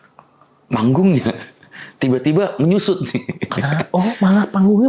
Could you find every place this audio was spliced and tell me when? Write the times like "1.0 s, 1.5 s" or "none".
none